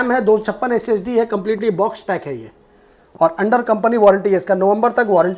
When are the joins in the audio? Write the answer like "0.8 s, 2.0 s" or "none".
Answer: none